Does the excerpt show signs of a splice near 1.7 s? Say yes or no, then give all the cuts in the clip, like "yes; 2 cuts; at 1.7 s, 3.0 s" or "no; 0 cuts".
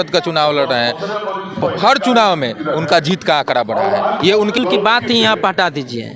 no; 1 cut; at 4.6 s